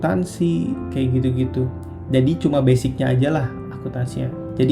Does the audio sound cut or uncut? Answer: uncut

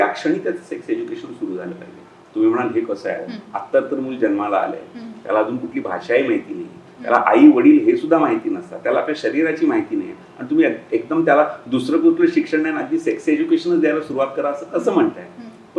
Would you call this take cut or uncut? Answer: uncut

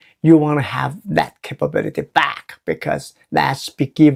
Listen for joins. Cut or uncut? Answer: uncut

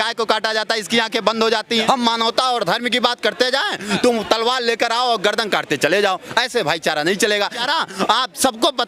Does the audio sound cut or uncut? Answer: cut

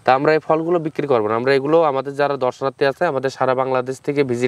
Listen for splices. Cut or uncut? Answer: uncut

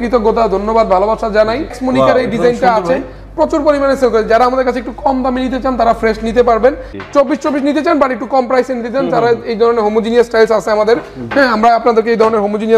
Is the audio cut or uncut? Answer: cut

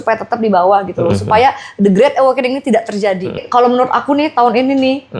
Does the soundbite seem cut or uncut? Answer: cut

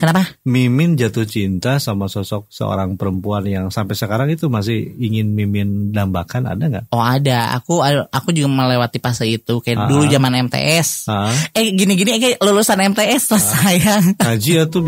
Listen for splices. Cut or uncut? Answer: uncut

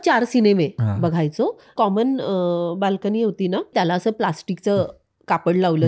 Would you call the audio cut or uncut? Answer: cut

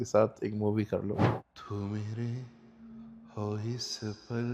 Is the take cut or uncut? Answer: cut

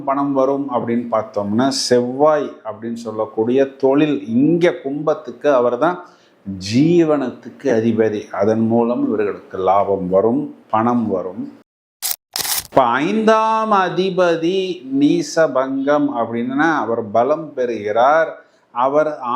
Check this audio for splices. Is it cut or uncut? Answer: cut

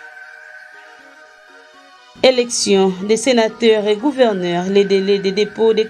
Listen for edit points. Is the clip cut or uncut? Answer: cut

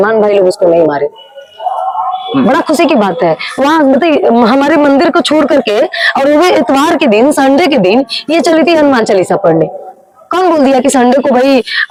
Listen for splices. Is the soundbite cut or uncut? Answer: uncut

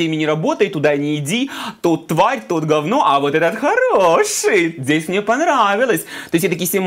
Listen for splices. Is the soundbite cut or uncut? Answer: uncut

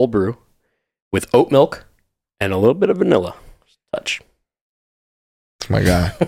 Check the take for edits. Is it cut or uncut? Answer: uncut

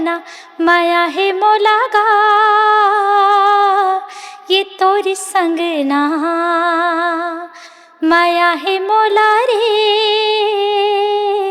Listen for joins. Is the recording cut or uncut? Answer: uncut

